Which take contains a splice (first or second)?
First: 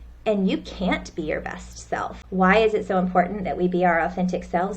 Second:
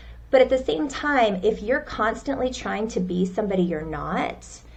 first